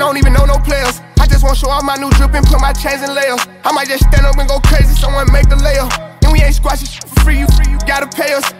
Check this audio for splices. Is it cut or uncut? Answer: uncut